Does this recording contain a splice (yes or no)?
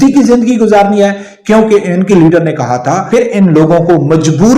yes